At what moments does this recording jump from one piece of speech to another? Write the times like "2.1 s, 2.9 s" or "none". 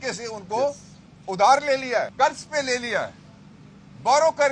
2.1 s